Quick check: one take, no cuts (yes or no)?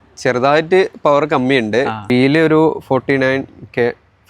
no